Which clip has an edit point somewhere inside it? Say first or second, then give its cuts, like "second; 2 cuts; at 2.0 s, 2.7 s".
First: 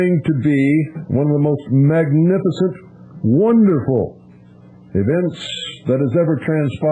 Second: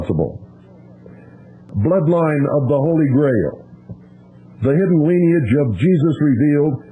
second; 1 cut; at 1.7 s